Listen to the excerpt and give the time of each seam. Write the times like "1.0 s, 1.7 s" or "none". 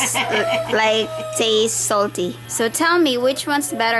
2.4 s

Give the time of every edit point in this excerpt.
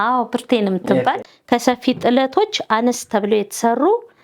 1.3 s

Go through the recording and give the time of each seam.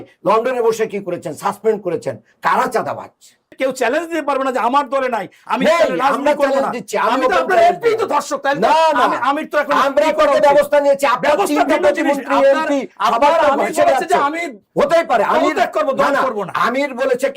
3.4 s

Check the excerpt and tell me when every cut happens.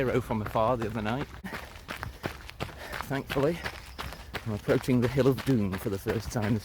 1.5 s

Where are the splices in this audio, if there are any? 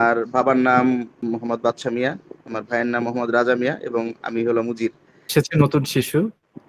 1.1 s, 5.3 s

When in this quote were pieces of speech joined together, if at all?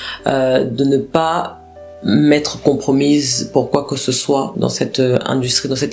4.5 s

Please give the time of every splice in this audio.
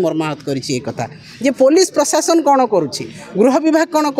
none

